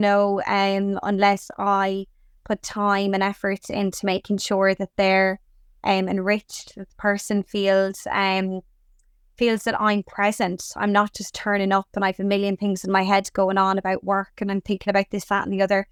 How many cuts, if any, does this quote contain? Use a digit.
0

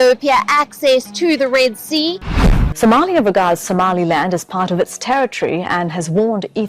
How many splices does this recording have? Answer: 1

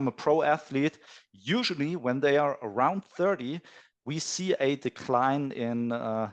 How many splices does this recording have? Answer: 1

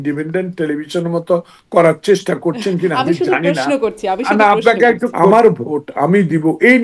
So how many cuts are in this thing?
1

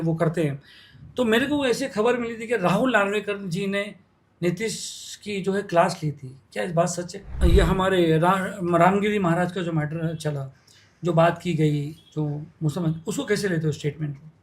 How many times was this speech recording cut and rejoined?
1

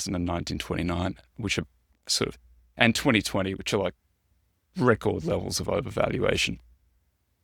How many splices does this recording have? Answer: 0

